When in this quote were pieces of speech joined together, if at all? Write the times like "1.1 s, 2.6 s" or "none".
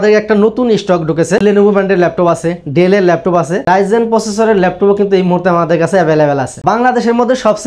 1.4 s, 3.6 s, 6.5 s